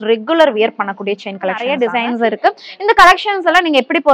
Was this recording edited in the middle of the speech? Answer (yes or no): yes